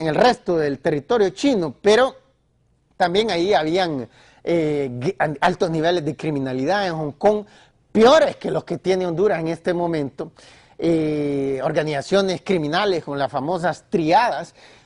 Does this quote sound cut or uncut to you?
cut